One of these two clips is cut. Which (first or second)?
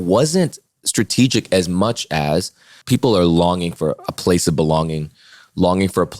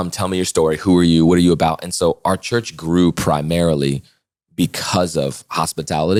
first